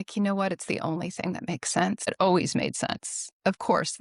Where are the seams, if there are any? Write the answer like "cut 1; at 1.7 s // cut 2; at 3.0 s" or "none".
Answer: cut 1; at 2.1 s